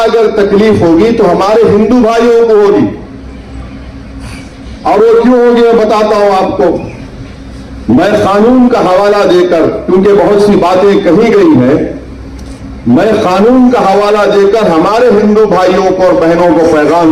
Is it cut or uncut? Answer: uncut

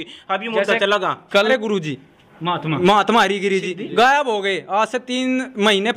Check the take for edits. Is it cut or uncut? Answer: cut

